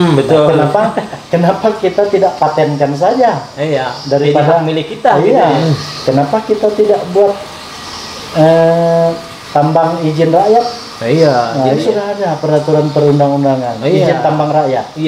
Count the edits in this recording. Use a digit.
2